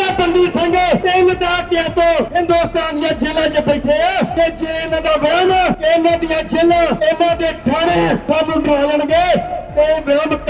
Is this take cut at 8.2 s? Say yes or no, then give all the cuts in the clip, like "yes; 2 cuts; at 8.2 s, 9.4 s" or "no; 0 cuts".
yes; 6 cuts; at 1.0 s, 2.3 s, 4.3 s, 5.8 s, 7.0 s, 8.2 s